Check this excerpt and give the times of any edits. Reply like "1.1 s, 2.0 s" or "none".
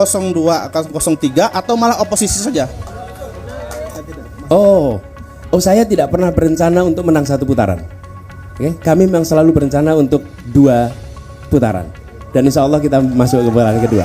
3.9 s